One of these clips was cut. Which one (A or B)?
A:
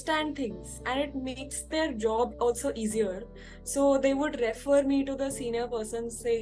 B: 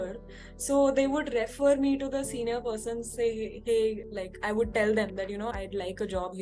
B